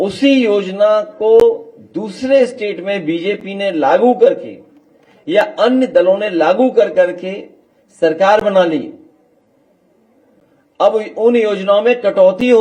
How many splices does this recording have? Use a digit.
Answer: 0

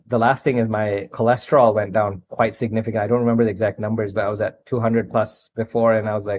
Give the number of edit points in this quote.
0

